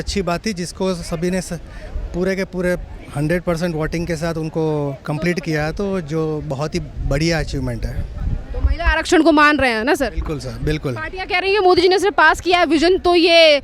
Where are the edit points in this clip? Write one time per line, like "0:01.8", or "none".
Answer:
none